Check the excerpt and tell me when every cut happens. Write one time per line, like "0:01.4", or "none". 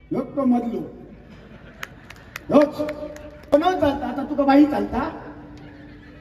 0:03.5